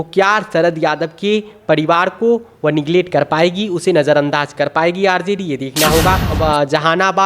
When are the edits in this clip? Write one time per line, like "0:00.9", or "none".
0:06.3